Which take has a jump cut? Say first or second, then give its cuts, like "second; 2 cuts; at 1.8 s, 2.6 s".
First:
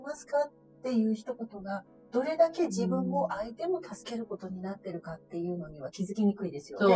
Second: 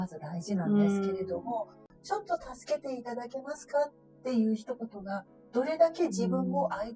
second; 1 cut; at 1.9 s